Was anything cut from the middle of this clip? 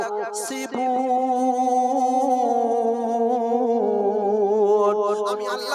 no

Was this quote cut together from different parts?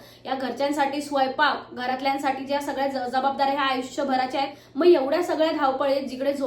yes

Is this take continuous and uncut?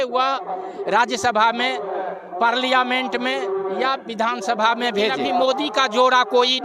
no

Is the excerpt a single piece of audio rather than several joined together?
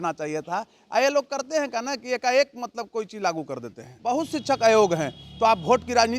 no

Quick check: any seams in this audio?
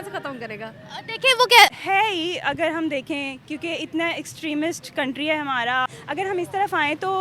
yes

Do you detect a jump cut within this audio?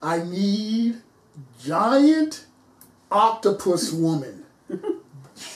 no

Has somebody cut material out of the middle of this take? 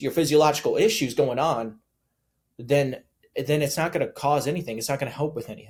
no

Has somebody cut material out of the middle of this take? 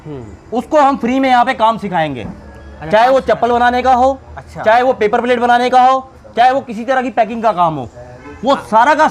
no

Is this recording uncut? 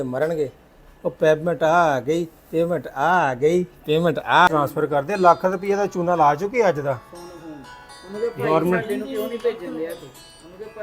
no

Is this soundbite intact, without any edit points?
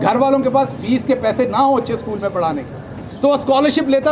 yes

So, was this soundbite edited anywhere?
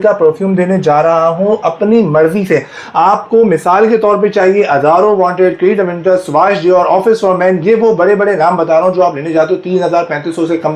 no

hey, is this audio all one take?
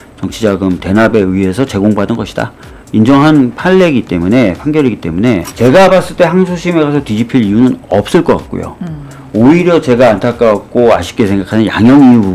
no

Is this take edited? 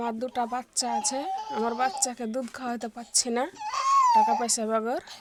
no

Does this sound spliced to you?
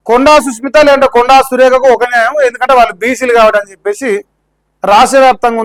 no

